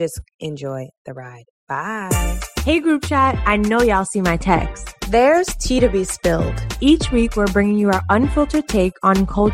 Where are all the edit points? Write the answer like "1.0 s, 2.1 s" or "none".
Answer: none